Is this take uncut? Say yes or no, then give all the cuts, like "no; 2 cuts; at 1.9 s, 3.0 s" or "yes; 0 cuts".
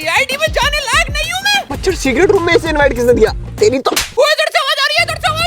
no; 2 cuts; at 1.7 s, 4.2 s